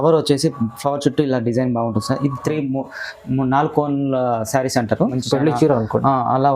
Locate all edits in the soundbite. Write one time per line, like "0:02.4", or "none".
0:05.2